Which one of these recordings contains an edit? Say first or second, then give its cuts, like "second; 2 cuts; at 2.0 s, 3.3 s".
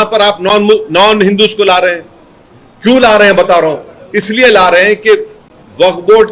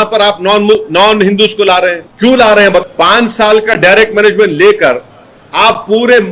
second; 2 cuts; at 2.1 s, 2.8 s